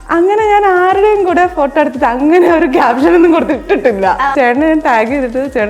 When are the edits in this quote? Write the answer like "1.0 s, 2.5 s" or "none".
4.3 s